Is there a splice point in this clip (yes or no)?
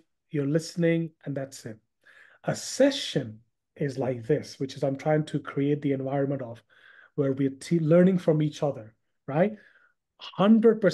no